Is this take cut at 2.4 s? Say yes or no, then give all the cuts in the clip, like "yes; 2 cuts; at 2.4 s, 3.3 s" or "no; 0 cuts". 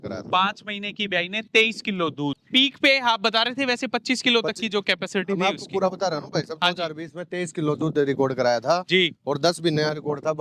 yes; 1 cut; at 2.4 s